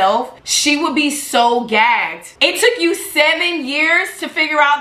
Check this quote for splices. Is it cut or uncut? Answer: cut